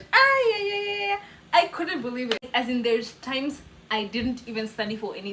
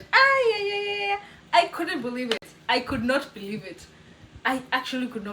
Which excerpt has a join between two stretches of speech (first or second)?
first